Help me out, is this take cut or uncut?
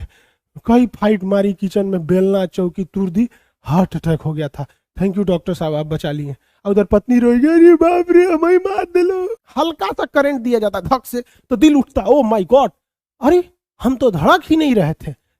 cut